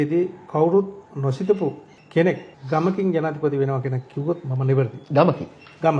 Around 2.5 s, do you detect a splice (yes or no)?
yes